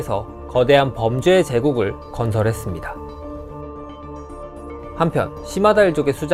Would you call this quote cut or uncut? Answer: uncut